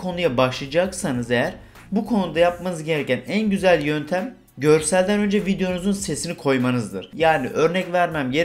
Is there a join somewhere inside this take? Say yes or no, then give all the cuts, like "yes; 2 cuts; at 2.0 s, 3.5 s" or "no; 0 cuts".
no; 0 cuts